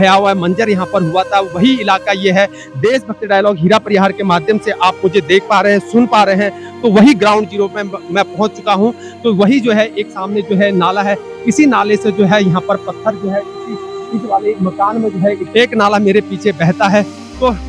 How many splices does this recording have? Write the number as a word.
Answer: one